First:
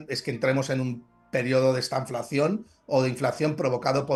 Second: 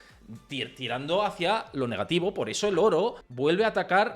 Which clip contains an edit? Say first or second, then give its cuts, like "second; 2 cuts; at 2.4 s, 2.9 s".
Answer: second; 1 cut; at 3.2 s